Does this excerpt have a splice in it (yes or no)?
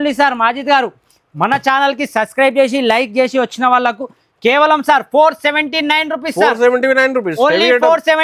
no